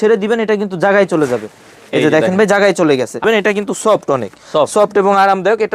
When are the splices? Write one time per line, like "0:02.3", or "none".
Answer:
0:03.2